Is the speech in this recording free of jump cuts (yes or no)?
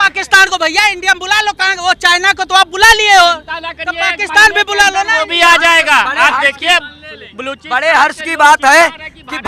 yes